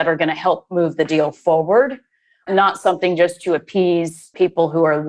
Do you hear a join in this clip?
yes; 2 cuts; at 2.4 s, 4.3 s

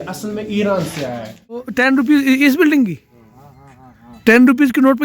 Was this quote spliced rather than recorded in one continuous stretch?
yes; 1 cut; at 1.6 s

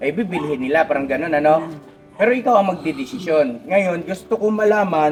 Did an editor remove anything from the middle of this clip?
no; 0 cuts

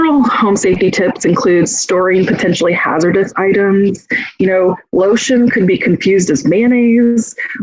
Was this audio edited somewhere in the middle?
no; 0 cuts

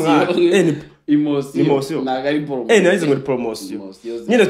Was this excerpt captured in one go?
yes; 0 cuts

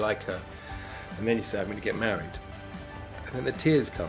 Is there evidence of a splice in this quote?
no; 0 cuts

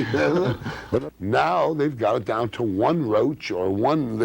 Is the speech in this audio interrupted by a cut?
yes; 1 cut; at 1.0 s

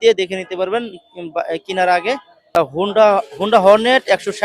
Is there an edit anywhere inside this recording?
yes; 1 cut; at 2.5 s

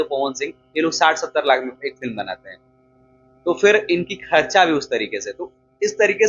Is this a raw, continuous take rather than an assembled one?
yes; 0 cuts

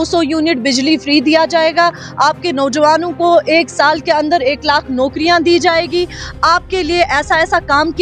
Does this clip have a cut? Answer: no; 0 cuts

